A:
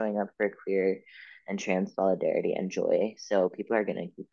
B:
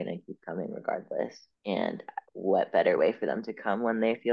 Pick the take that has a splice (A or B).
B